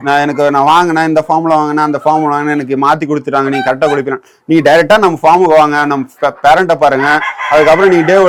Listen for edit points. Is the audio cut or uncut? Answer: uncut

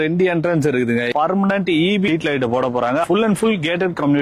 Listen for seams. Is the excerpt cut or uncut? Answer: cut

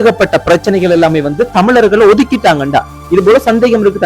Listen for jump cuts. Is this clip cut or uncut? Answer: uncut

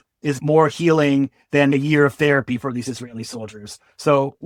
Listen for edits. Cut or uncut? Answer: uncut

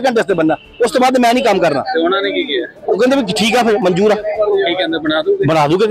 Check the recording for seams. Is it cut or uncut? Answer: uncut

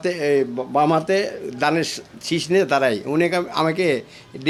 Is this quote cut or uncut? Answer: uncut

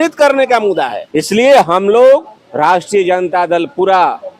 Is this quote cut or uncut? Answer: cut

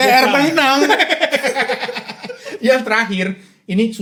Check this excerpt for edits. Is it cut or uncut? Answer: uncut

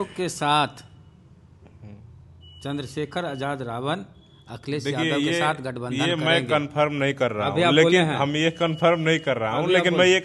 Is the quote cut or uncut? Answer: uncut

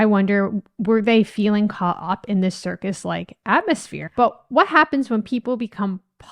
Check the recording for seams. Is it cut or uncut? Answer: cut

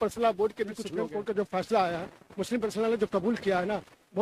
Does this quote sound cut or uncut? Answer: cut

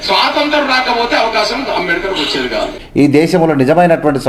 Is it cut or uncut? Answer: cut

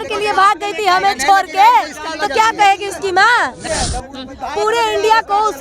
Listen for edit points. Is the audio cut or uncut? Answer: cut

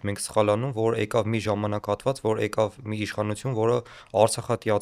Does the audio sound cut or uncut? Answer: uncut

